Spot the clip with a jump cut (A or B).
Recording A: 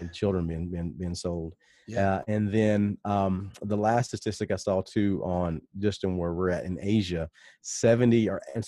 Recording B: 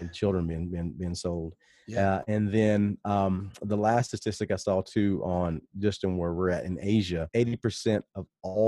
B